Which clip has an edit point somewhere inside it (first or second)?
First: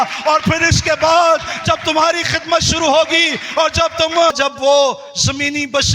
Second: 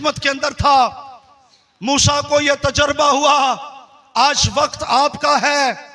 first